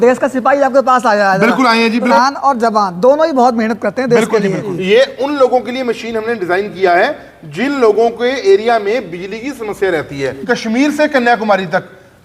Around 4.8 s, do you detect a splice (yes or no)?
yes